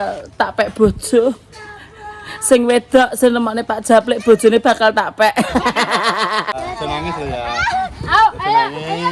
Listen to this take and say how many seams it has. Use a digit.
1